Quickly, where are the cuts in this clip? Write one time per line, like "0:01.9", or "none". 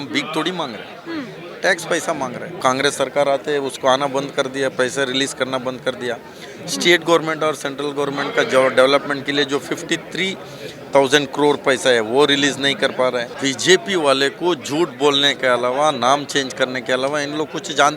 0:02.6
0:13.3